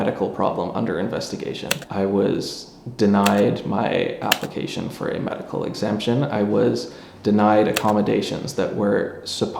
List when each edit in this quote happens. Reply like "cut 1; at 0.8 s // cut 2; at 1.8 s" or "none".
cut 1; at 1.8 s